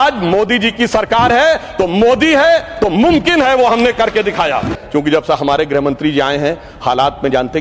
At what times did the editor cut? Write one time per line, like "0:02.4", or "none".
0:04.8